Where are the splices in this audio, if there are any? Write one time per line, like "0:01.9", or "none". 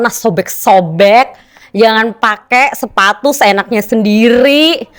none